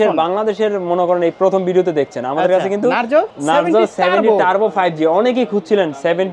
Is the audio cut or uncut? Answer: cut